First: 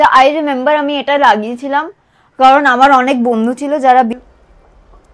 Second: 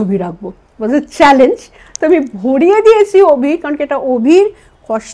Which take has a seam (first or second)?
first